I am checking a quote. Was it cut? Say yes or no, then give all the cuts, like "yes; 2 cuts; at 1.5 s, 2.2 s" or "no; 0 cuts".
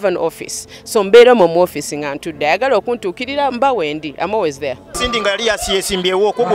yes; 1 cut; at 5.0 s